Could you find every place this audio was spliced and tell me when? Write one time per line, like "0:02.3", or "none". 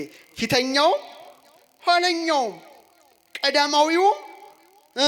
none

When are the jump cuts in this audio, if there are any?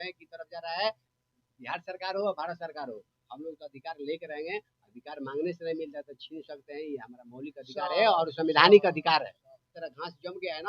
0:09.7

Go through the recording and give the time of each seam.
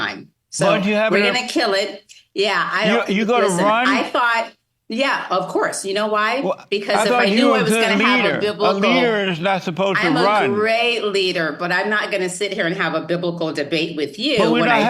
none

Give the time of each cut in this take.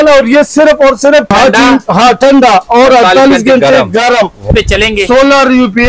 0:01.3
0:04.5

